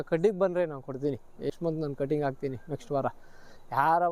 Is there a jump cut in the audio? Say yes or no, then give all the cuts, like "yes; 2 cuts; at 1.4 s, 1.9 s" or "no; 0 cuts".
yes; 1 cut; at 1.5 s